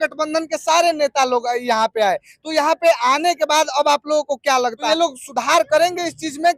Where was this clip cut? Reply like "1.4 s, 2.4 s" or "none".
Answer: 4.8 s